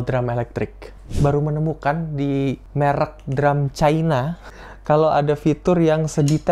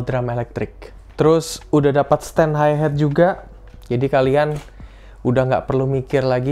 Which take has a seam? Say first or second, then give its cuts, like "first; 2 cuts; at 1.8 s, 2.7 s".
first; 3 cuts; at 1.0 s, 2.7 s, 4.5 s